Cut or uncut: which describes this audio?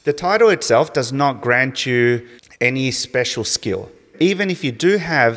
cut